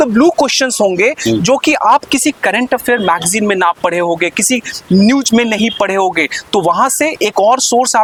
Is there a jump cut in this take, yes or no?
no